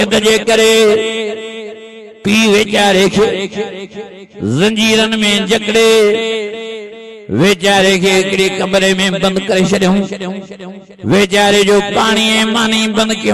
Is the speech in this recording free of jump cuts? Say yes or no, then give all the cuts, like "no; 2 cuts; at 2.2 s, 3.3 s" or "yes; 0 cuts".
yes; 0 cuts